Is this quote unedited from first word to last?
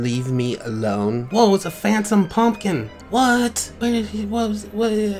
no; 3 cuts; at 1.3 s, 3.0 s, 3.7 s

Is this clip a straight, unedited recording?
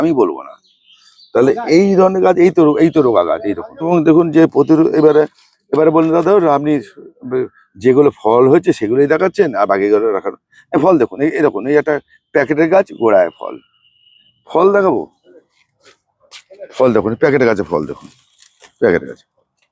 no; 1 cut; at 3.9 s

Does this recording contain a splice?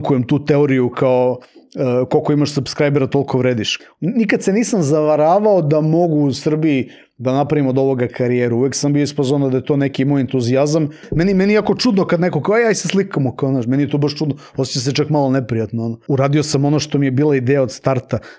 yes; 3 cuts; at 3.7 s, 11.1 s, 16.0 s

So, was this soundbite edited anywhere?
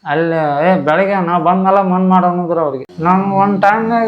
yes; 1 cut; at 2.8 s

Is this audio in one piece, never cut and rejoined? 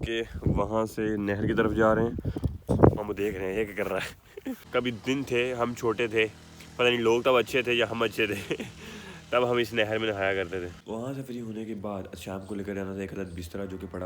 no; 3 cuts; at 2.7 s, 4.6 s, 10.7 s

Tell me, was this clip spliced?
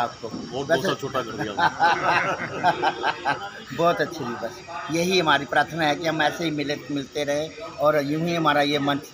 no; 0 cuts

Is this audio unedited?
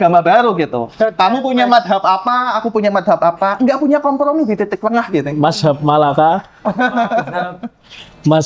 yes; 0 cuts

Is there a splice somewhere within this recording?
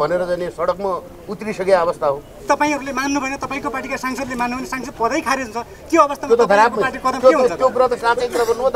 yes; 1 cut; at 2.3 s

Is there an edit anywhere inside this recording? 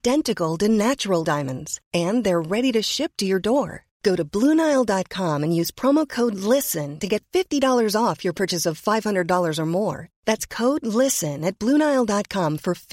no; 0 cuts

